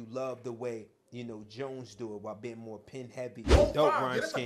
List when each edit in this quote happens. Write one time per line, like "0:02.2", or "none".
0:03.5

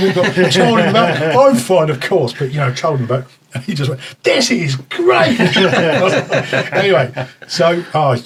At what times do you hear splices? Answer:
none

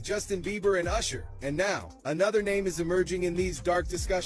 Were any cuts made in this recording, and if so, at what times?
none

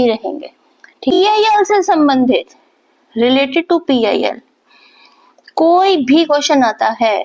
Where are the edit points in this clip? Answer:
0:01.1

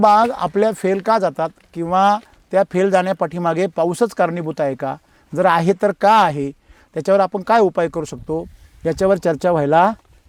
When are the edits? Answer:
none

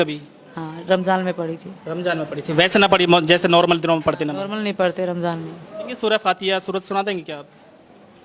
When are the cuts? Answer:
0:05.9

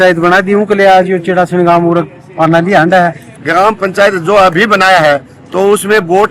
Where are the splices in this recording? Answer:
0:03.3

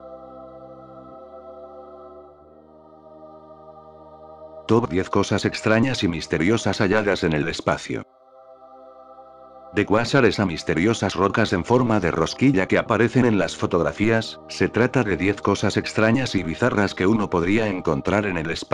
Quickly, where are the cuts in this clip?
none

